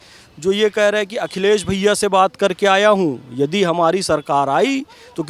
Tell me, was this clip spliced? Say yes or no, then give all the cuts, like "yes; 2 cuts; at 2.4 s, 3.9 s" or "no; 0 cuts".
no; 0 cuts